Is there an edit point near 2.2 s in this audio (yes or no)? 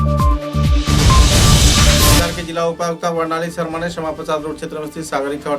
yes